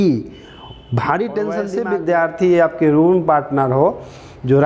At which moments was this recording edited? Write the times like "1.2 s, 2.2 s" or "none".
1.8 s